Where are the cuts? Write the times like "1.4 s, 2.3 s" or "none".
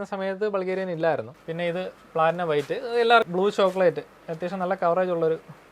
1.4 s, 3.3 s